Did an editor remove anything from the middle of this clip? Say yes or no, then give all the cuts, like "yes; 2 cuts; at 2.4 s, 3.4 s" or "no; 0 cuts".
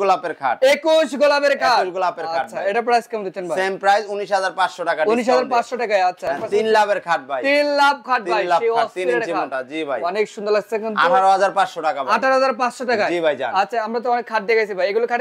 no; 0 cuts